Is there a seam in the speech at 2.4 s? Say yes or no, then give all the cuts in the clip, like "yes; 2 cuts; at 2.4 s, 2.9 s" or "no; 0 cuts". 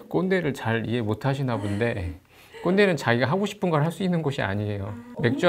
no; 0 cuts